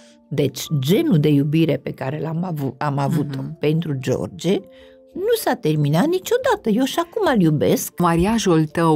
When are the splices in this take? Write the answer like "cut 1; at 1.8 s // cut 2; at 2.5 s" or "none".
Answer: cut 1; at 8.0 s